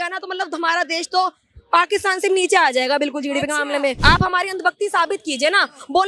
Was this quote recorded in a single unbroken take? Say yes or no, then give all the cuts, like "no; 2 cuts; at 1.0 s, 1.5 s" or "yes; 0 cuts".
no; 1 cut; at 4.0 s